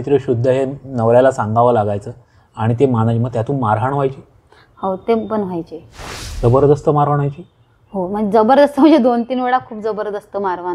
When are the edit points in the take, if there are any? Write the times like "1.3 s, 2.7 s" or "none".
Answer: none